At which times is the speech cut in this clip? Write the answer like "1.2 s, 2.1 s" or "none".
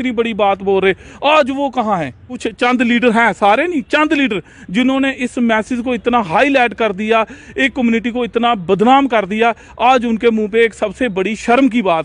2.4 s